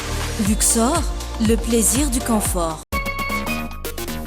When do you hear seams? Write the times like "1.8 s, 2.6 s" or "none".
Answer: none